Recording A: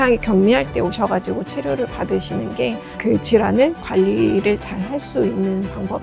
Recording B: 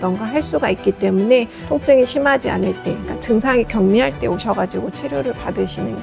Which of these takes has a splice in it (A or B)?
B